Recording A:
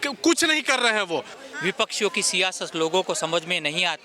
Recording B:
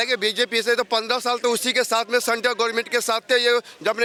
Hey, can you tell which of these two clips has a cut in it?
A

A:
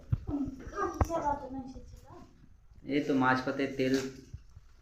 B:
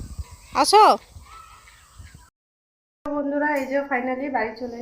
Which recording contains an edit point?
B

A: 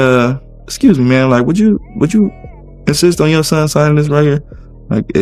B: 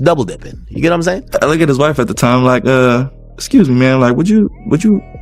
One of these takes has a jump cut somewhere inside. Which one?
B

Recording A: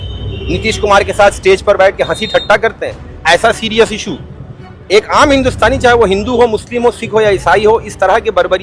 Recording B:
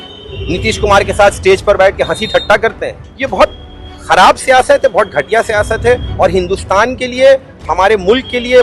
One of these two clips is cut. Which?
B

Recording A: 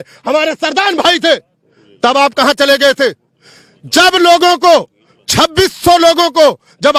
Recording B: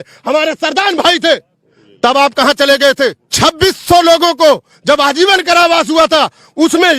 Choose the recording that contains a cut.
B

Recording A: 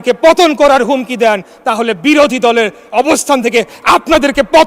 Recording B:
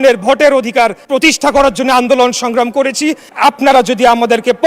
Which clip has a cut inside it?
B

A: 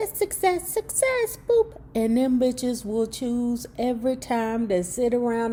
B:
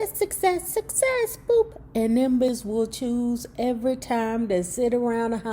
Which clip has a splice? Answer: B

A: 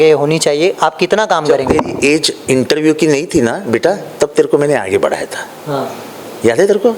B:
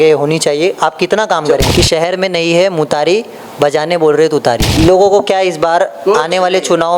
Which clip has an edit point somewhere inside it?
B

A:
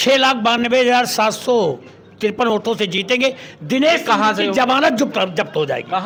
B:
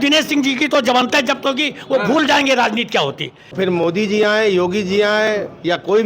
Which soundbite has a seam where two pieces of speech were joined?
B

